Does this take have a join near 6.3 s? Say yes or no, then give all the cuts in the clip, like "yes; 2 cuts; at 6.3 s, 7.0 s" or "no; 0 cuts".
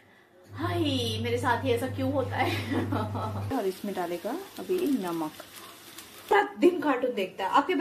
yes; 2 cuts; at 3.5 s, 6.3 s